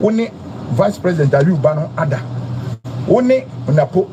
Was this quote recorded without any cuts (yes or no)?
yes